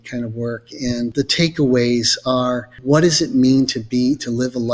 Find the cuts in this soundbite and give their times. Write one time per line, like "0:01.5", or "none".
0:01.1
0:02.7

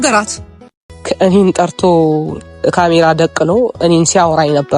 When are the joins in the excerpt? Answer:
0:01.0

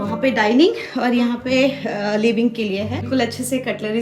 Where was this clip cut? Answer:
0:03.1

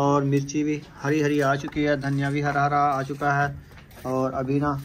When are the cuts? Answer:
none

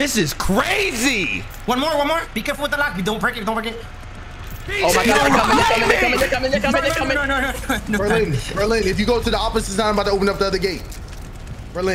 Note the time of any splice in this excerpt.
0:01.5

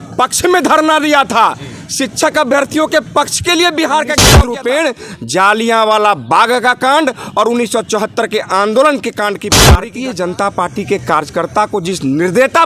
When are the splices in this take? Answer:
0:04.2
0:09.6

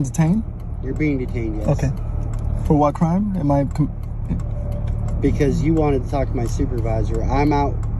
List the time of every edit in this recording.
none

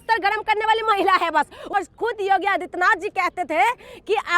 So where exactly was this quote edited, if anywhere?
0:01.7

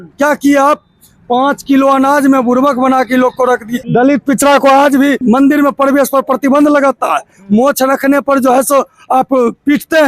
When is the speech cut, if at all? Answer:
0:03.8
0:05.2

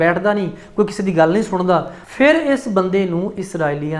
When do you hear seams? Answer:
0:02.0

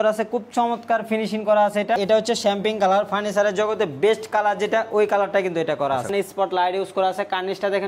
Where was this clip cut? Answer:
0:02.0
0:06.1

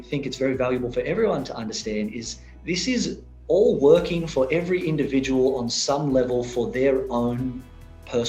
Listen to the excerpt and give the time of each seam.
none

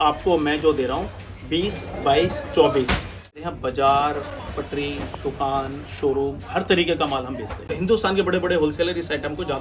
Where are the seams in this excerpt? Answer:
0:03.3
0:07.7

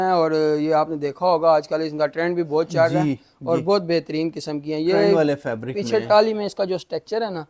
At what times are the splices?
none

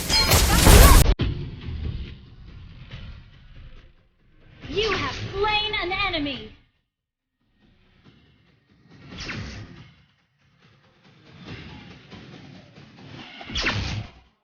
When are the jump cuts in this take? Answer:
0:01.3

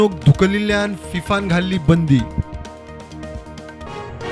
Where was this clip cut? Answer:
0:03.4

